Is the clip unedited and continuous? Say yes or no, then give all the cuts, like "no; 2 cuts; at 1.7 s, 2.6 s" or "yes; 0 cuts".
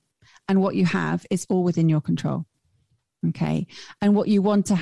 yes; 0 cuts